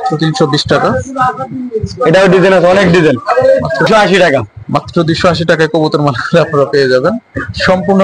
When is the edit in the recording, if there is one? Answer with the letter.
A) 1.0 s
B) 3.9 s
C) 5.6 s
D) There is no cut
B